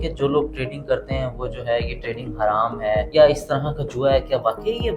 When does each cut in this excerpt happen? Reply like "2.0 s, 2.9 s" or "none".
3.1 s